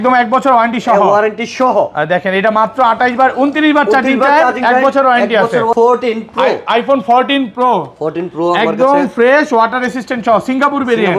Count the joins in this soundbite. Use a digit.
1